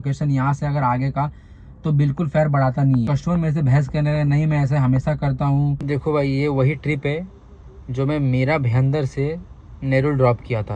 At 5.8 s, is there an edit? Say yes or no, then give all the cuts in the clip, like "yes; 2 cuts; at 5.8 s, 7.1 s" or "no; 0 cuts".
yes; 2 cuts; at 3.1 s, 5.8 s